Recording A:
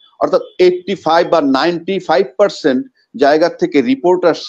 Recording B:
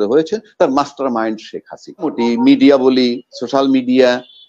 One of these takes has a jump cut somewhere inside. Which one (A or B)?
B